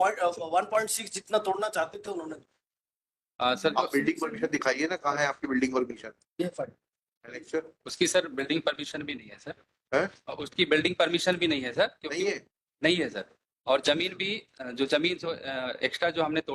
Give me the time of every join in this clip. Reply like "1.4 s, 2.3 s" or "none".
none